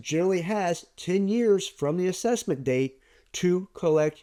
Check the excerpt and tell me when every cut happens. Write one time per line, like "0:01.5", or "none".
none